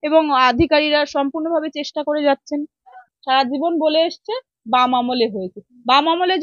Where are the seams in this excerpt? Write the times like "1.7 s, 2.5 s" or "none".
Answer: 3.1 s